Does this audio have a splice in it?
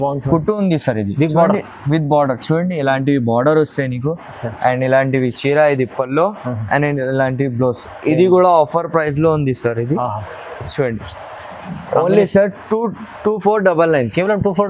no; 0 cuts

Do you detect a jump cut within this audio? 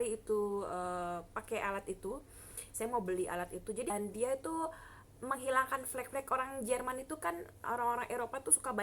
yes; 1 cut; at 3.9 s

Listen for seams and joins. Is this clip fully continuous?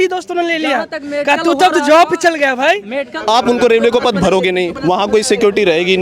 no; 1 cut; at 3.1 s

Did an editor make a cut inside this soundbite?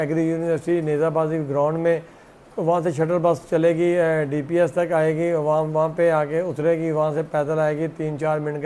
no; 0 cuts

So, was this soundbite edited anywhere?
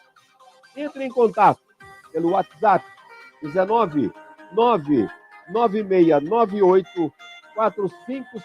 yes; 1 cut; at 6.2 s

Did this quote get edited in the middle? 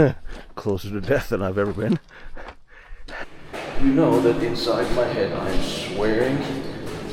yes; 1 cut; at 3.4 s

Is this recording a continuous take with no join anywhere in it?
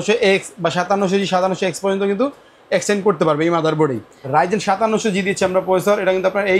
no; 1 cut; at 4.3 s

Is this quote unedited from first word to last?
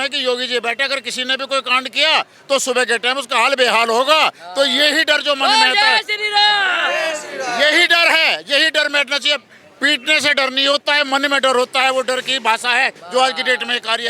yes; 0 cuts

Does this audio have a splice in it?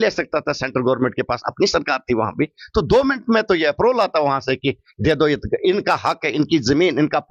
no; 0 cuts

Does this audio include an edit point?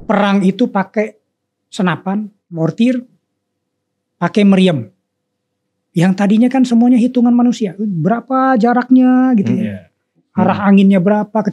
yes; 2 cuts; at 2.6 s, 10.2 s

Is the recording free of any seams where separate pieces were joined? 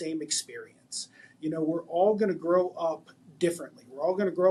yes; 0 cuts

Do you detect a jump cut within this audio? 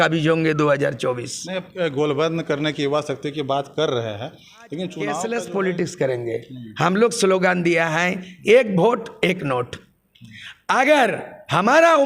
yes; 1 cut; at 5.2 s

